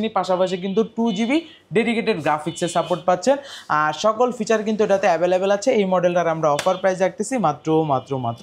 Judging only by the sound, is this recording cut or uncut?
uncut